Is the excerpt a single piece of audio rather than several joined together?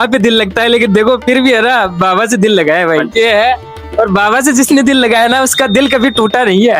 yes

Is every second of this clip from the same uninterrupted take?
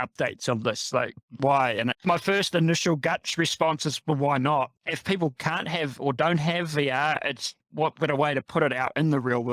no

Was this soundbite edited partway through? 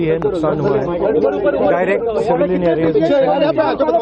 no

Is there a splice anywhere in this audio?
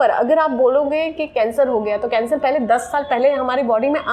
no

